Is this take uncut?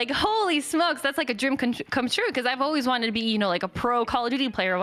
yes; 0 cuts

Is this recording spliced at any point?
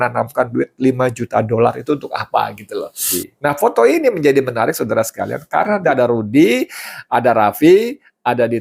yes; 2 cuts; at 3.2 s, 5.8 s

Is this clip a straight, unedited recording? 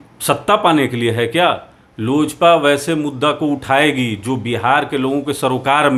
yes; 0 cuts

